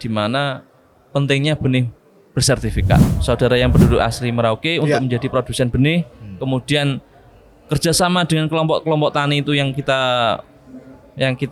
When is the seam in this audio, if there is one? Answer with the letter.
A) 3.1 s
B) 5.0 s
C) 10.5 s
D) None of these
A